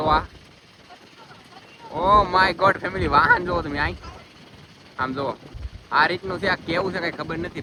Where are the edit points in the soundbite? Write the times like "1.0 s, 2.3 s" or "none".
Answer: none